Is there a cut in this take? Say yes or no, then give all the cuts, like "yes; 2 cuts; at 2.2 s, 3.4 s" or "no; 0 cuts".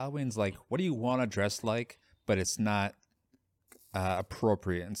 no; 0 cuts